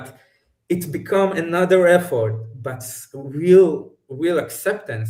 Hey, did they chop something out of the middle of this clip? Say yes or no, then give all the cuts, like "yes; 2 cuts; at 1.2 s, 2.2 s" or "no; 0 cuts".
no; 0 cuts